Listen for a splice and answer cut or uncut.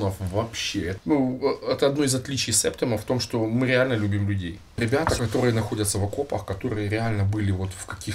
cut